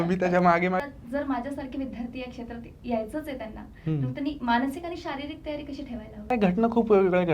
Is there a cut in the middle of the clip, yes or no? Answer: yes